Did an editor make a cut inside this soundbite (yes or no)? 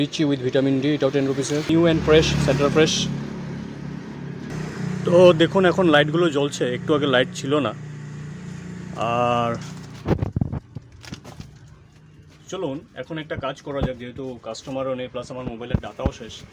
yes